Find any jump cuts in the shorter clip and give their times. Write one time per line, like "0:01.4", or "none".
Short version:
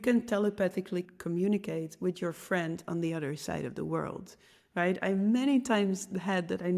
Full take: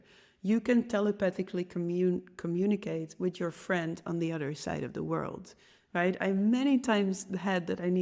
0:01.1

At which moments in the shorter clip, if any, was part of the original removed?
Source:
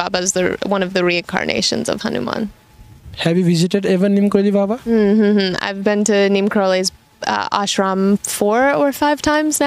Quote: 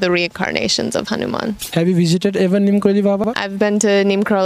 0:01.6
0:03.3

